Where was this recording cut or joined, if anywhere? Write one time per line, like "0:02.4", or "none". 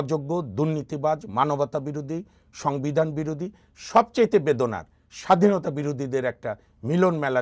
none

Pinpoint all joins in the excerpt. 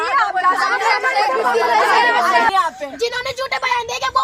0:02.5

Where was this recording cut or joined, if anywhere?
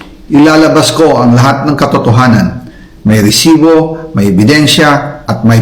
none

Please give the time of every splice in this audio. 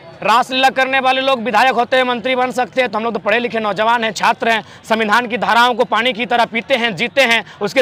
none

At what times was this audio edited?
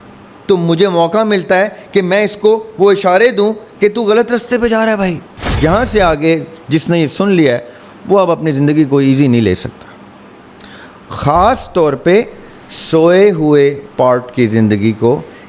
0:05.3

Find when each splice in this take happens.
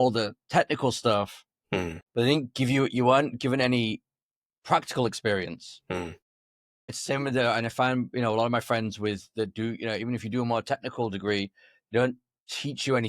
0:02.0

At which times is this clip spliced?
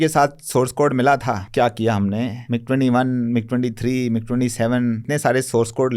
0:01.4
0:02.4
0:05.1

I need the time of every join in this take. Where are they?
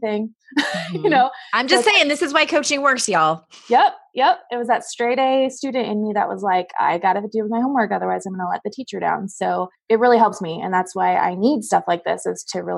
0:09.7

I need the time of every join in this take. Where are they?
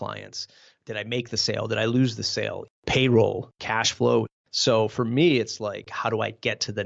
0:02.7
0:03.5
0:04.4
0:05.9

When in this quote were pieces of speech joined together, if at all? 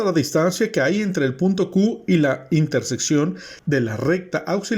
0:03.5

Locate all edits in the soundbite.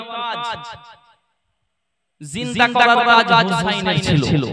none

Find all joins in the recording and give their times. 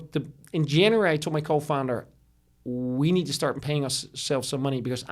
0:03.6

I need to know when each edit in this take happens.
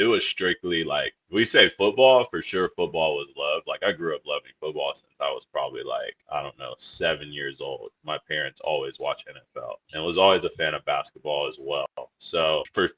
none

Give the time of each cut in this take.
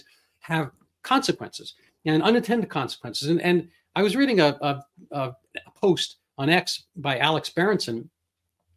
none

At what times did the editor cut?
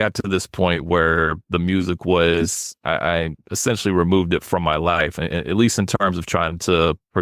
none

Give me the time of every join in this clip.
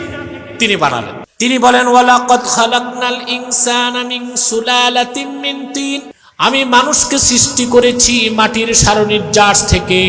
0:01.2
0:06.2

